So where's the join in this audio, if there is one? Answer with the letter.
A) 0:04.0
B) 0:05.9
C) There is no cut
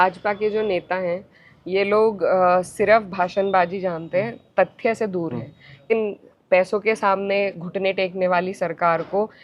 B